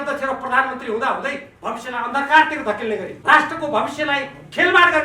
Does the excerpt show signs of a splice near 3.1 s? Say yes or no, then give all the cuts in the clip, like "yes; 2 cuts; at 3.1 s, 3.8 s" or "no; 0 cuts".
yes; 2 cuts; at 1.5 s, 3.1 s